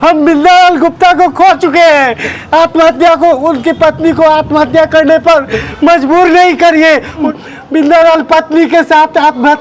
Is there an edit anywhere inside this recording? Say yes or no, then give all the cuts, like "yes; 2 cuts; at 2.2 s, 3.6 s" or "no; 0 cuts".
yes; 2 cuts; at 2.4 s, 7.2 s